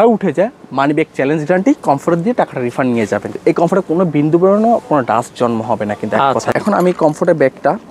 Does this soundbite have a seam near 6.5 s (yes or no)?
yes